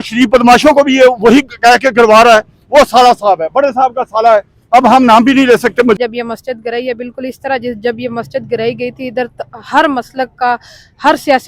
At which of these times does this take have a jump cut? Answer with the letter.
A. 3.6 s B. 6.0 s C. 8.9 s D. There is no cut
B